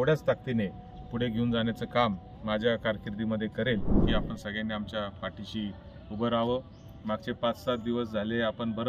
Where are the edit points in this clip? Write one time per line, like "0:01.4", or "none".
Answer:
0:04.0